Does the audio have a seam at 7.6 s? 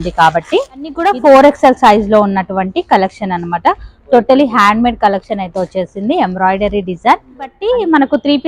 yes; 2 cuts; at 1.0 s, 7.6 s

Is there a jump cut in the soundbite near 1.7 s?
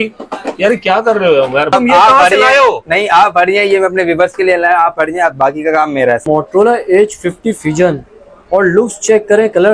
yes; 2 cuts; at 1.7 s, 6.2 s

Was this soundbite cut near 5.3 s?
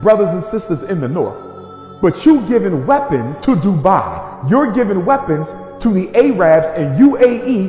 no; 1 cut; at 3.3 s

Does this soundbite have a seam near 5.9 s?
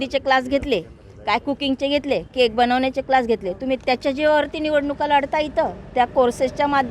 no; 0 cuts

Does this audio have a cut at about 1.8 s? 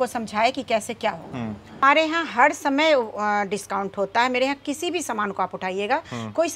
yes; 1 cut; at 1.8 s

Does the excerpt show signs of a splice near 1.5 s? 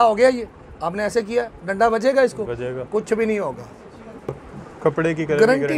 no; 1 cut; at 4.4 s

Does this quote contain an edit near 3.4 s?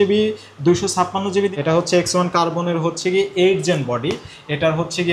no; 1 cut; at 1.5 s

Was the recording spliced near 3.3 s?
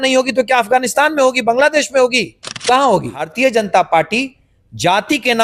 yes; 1 cut; at 3.3 s

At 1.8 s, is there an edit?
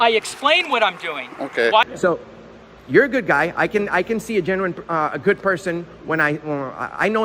yes; 1 cut; at 1.8 s

